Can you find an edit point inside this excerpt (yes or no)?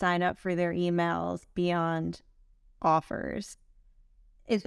no